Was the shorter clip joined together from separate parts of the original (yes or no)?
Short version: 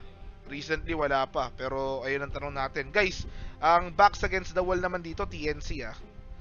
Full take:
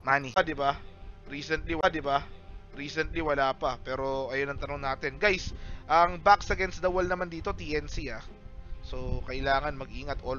yes